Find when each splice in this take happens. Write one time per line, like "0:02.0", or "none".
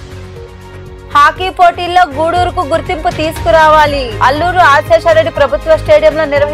0:01.1